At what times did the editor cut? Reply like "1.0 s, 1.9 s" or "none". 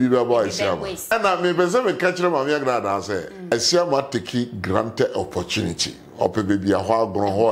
1.1 s, 3.5 s